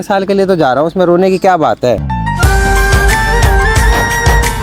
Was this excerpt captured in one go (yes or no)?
yes